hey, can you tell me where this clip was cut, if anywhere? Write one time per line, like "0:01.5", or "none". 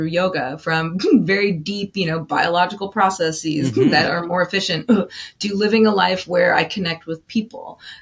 none